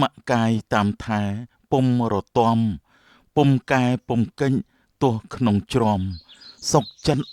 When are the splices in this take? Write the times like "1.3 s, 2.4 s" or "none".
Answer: none

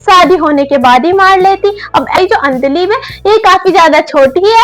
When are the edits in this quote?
2.2 s

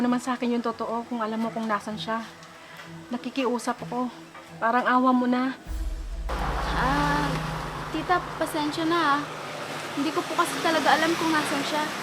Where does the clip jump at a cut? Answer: none

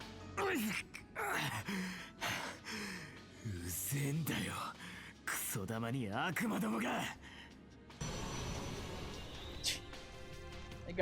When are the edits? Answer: 8.0 s

